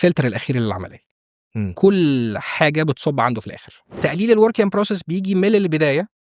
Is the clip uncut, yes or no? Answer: no